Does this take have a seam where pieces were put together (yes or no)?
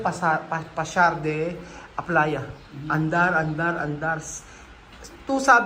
no